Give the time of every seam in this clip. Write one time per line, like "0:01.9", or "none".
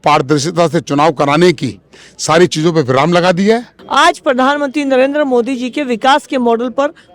0:03.8